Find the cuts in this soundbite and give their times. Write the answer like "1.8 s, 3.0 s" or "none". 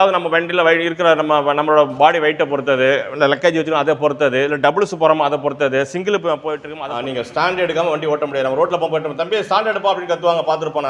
6.7 s